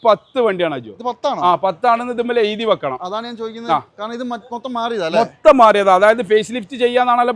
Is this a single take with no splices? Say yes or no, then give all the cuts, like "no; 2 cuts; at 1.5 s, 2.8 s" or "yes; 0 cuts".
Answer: yes; 0 cuts